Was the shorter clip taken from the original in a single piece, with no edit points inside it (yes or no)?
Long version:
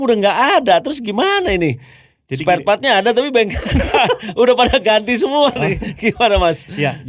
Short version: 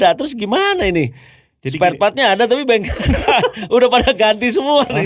yes